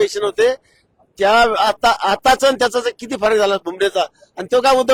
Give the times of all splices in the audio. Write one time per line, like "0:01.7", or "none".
none